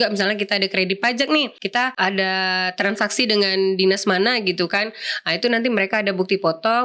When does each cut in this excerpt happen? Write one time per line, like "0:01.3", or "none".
0:01.6